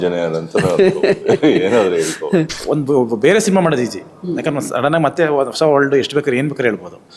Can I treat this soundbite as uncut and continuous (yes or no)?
no